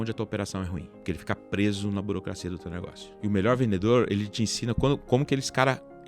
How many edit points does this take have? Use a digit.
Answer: 2